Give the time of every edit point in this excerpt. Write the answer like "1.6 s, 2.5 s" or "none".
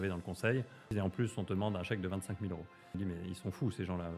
0.9 s, 3.0 s